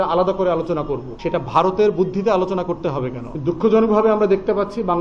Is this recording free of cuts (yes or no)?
no